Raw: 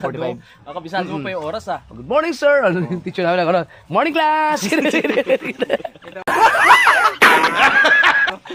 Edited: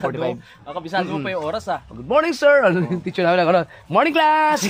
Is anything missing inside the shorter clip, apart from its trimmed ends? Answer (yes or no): no